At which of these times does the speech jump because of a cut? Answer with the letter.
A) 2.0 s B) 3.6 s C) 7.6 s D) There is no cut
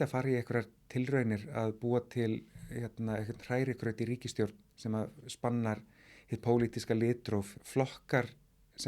C